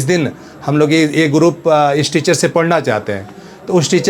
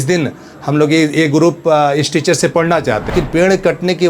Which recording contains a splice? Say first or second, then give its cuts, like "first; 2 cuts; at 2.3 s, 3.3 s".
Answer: second; 1 cut; at 3.1 s